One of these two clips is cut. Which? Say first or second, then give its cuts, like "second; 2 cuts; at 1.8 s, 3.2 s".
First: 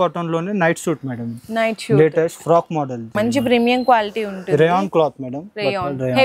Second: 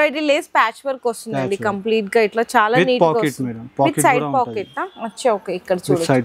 first; 1 cut; at 3.0 s